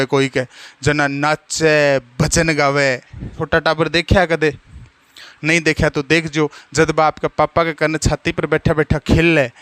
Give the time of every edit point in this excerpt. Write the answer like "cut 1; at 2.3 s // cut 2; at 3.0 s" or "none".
cut 1; at 3.4 s